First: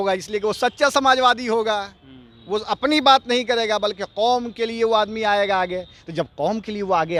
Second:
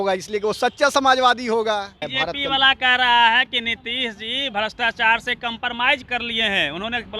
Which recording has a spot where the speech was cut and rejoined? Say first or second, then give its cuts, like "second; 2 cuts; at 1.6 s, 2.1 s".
second; 2 cuts; at 2.1 s, 6.0 s